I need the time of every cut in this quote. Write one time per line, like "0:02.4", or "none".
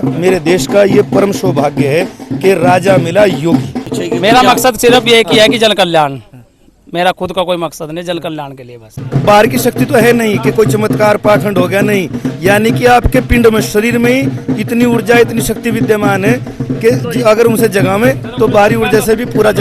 0:03.9
0:09.0